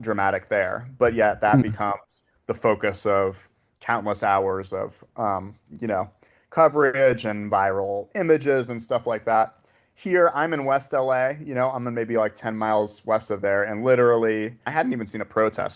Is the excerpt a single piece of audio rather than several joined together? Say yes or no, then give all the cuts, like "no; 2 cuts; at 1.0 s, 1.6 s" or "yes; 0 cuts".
no; 1 cut; at 14.6 s